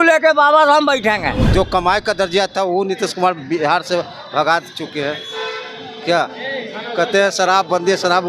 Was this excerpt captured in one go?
no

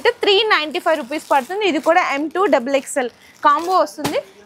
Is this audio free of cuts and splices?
yes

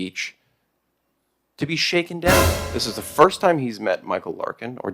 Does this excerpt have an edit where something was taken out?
yes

